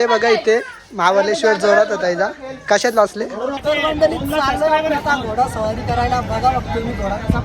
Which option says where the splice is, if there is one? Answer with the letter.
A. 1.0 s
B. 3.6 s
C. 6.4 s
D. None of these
B